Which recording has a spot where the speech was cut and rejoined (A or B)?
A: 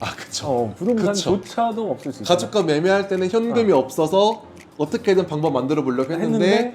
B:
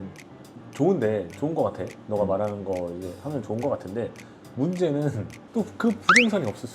B